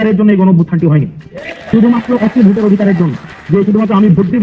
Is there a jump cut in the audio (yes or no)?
no